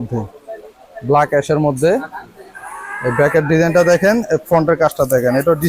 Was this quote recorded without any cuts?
yes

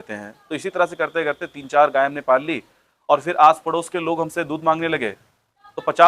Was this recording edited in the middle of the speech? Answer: no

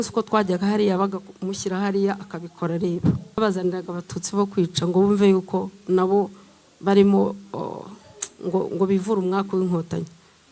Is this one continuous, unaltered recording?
no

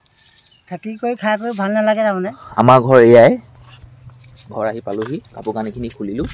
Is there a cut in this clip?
yes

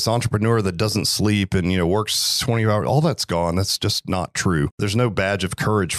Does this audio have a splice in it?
yes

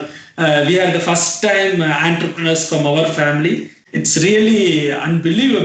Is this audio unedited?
no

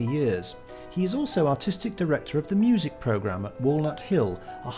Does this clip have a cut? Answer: no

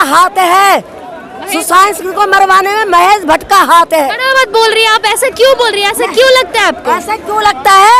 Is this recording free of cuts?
yes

